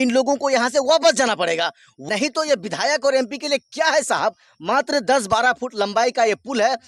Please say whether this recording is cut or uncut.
cut